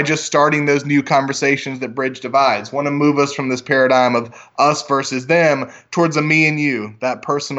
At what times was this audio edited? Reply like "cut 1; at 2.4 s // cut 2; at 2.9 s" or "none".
none